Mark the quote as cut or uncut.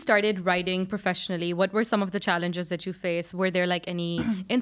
uncut